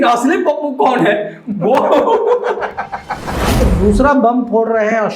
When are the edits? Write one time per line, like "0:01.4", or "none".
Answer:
0:03.4